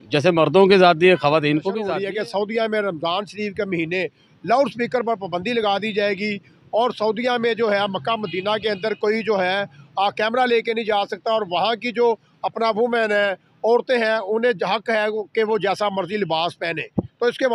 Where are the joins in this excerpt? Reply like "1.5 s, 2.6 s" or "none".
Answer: 1.9 s